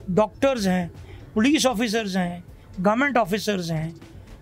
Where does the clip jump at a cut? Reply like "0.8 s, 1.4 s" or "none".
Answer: none